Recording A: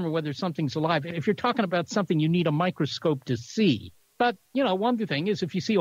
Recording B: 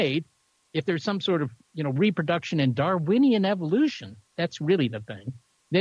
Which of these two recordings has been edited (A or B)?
A